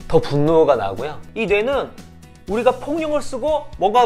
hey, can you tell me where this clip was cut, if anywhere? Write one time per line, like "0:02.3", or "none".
0:01.2